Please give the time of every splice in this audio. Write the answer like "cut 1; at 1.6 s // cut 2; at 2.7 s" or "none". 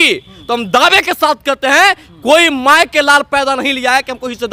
none